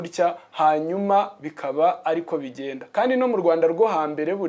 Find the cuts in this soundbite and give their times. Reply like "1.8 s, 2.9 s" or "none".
none